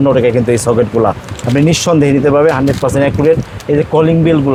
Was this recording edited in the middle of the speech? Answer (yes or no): no